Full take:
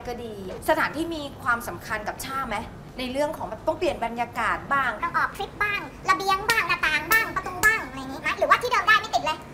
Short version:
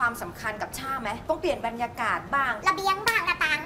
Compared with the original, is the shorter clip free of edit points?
no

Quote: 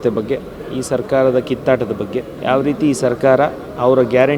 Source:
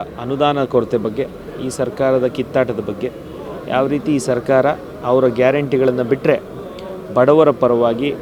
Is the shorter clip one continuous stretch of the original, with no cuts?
no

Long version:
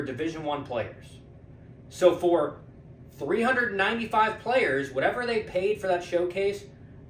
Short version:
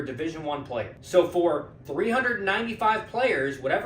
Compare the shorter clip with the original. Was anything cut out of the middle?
yes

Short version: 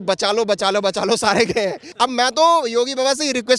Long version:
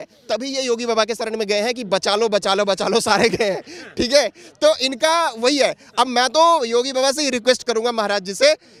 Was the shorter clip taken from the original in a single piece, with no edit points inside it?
no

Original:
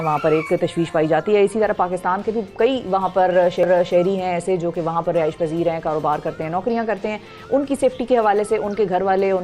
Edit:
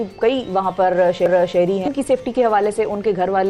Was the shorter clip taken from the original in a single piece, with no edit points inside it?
no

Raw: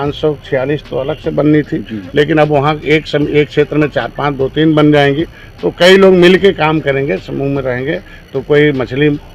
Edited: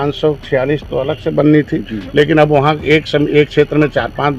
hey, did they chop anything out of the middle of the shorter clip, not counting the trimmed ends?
no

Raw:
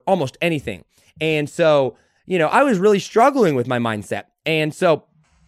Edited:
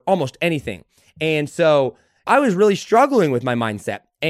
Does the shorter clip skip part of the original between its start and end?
yes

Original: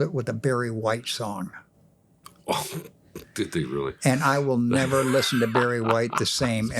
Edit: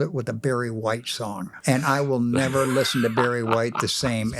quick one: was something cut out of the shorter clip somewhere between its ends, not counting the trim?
yes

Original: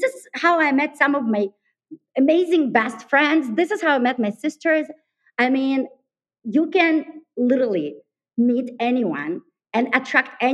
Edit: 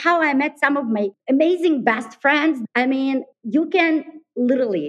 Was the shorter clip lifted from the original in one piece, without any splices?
no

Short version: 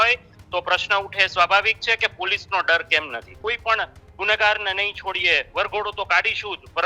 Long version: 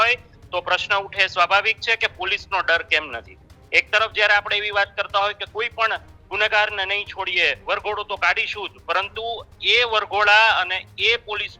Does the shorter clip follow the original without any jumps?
no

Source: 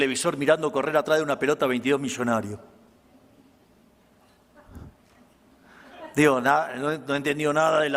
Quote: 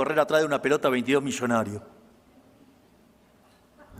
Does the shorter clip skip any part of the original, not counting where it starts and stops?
no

